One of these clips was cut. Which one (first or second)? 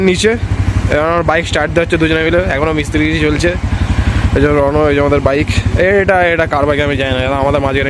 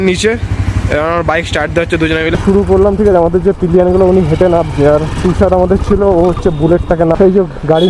second